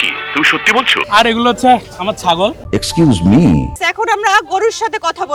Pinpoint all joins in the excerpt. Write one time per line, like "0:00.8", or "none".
0:01.0
0:03.7